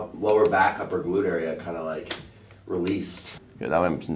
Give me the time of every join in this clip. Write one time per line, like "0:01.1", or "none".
0:03.2